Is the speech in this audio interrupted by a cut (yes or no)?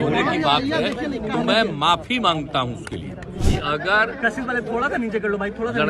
yes